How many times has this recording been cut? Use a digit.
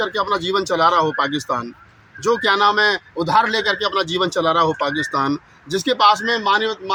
0